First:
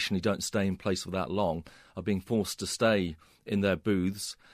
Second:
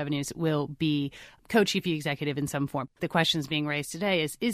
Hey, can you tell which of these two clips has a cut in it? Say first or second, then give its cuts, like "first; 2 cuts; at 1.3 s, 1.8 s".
second; 1 cut; at 3.0 s